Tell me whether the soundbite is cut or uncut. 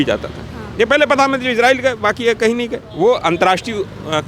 cut